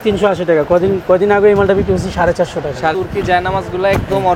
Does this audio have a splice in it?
yes; 1 cut; at 2.9 s

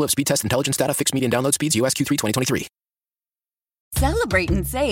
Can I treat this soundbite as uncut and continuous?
no; 1 cut; at 3.8 s

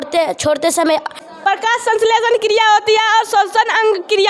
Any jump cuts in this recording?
yes; 1 cut; at 1.2 s

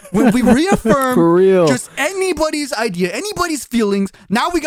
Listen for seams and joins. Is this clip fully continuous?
yes; 0 cuts

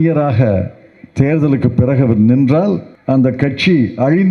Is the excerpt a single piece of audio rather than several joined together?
no; 1 cut; at 2.9 s

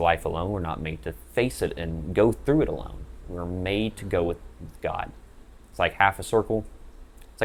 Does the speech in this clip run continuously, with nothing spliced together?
yes; 0 cuts

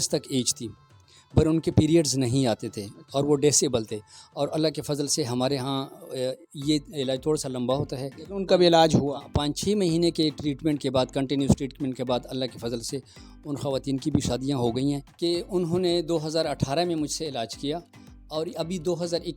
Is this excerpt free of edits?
no; 1 cut; at 15.1 s

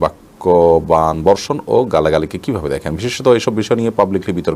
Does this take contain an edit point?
no; 0 cuts

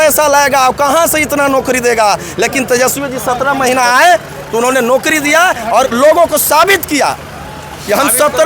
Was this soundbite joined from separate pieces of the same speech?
no; 0 cuts

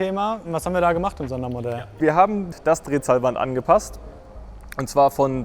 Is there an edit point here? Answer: no; 0 cuts

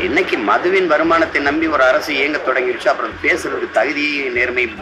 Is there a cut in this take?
no; 0 cuts

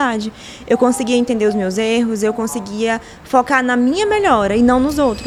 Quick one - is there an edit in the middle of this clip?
no; 0 cuts

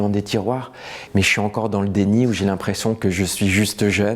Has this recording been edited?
no; 0 cuts

